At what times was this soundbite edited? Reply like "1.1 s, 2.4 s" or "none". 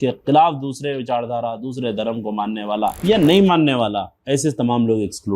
3.0 s